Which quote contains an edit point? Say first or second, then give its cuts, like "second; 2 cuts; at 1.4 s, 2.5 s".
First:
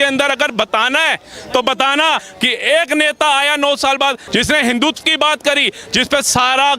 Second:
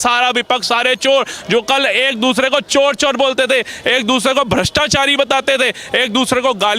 first; 2 cuts; at 2.2 s, 4.2 s